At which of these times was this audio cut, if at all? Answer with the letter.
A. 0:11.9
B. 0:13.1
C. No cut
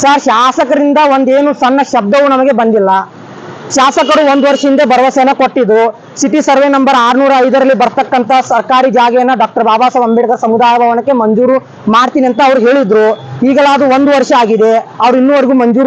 C